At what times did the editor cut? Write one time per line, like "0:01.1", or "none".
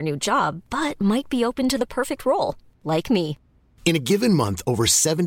none